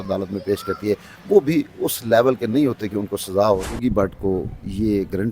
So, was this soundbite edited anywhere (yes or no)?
yes